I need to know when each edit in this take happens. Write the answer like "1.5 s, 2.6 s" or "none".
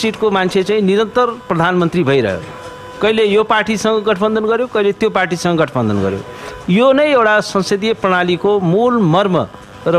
none